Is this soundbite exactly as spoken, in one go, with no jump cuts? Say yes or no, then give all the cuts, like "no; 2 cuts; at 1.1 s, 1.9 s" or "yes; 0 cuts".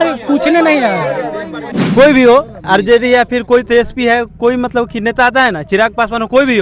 no; 1 cut; at 1.8 s